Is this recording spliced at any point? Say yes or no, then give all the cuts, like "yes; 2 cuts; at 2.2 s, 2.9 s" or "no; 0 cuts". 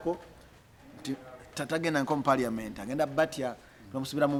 no; 0 cuts